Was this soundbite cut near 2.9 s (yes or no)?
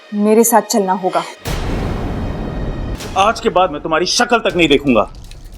yes